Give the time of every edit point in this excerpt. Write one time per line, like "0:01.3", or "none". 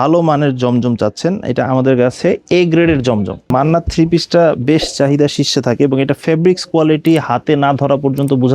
0:03.5